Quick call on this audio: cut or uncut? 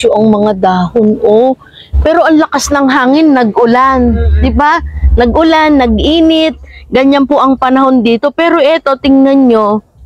uncut